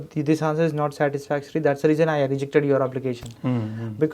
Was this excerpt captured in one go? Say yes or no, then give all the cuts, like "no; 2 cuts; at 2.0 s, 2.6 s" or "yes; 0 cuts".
yes; 0 cuts